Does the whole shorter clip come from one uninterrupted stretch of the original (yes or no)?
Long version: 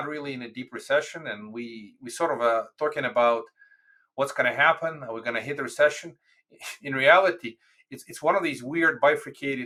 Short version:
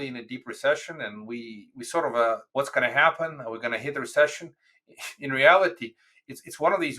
no